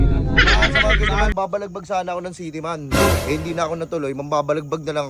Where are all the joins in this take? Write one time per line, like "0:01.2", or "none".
0:01.3